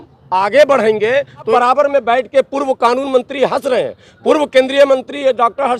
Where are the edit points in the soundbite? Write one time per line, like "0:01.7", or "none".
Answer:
0:01.5